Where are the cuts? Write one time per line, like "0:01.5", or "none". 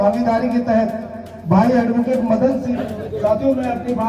0:02.8